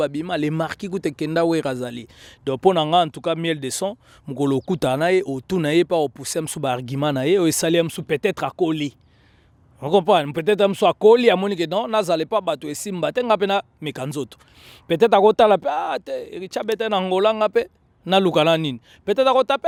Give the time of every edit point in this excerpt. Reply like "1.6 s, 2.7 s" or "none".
none